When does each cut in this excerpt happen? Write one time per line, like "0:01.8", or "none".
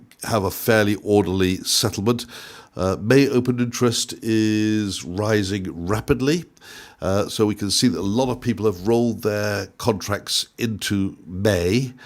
none

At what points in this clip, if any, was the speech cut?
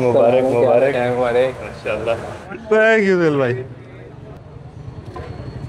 none

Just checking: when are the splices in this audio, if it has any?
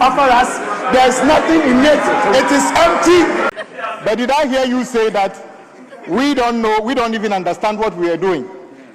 0:03.5

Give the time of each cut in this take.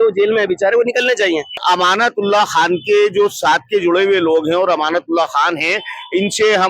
0:01.6

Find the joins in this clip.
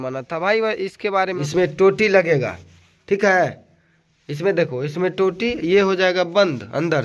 0:01.4

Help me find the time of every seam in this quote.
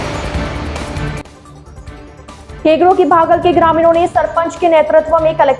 0:02.6

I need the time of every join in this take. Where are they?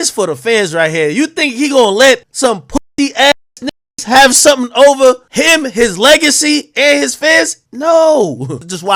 none

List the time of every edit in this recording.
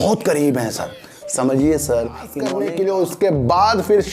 0:02.4

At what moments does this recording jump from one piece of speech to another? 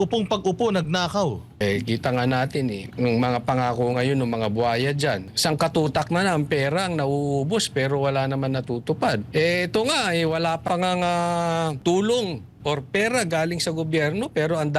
0:01.6
0:02.8
0:05.3
0:09.3
0:10.6
0:11.8

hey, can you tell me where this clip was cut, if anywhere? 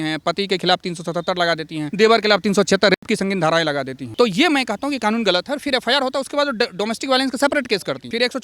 none

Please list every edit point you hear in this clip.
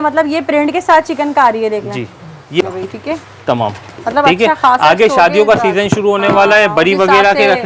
0:02.6

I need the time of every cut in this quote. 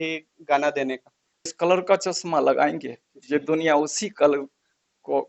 0:01.5

